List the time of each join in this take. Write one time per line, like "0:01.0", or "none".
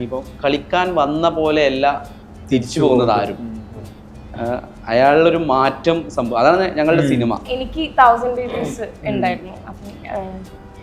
0:07.4